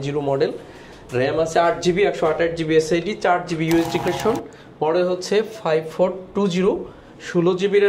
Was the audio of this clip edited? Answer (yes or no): yes